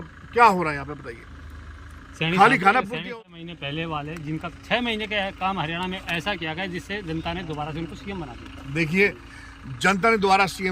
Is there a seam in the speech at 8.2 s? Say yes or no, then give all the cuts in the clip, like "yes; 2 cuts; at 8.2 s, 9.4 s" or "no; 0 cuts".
no; 1 cut; at 3.0 s